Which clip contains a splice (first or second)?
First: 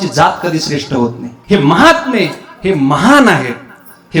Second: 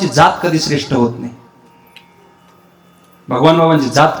first